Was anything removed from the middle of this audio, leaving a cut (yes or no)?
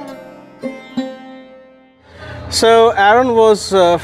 yes